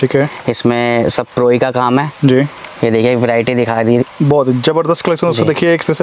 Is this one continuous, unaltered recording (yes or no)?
yes